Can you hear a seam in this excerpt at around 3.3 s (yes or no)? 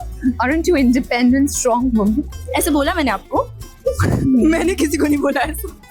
no